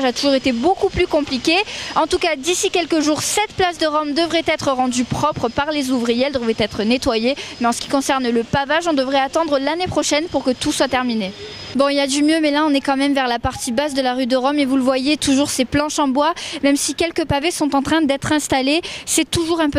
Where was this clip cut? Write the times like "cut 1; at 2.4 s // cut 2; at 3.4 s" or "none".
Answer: none